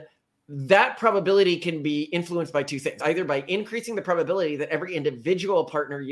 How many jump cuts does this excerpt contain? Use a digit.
1